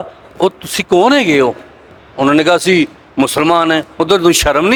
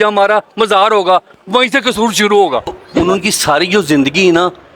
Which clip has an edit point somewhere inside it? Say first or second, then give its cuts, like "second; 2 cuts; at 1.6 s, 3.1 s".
second; 1 cut; at 2.8 s